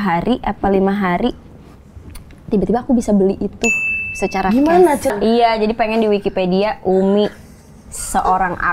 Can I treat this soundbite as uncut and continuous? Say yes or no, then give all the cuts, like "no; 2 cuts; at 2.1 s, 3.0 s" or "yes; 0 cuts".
no; 1 cut; at 5.1 s